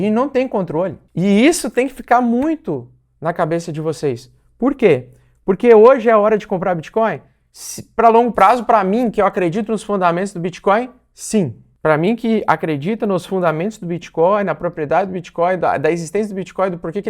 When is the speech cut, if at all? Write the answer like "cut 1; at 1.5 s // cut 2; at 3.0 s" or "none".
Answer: cut 1; at 1.0 s // cut 2; at 11.6 s